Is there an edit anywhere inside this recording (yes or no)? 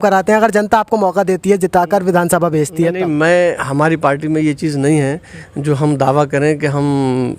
no